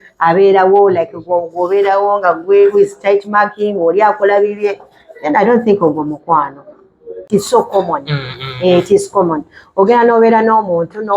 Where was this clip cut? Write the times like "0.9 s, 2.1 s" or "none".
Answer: 7.3 s